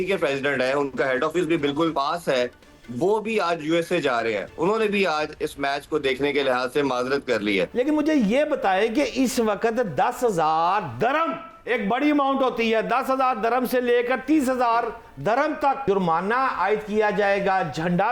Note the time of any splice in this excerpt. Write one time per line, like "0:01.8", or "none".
0:01.9
0:07.7
0:15.8